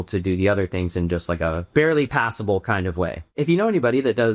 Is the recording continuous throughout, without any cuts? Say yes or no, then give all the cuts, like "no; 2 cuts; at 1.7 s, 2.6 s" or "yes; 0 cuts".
no; 2 cuts; at 1.6 s, 3.4 s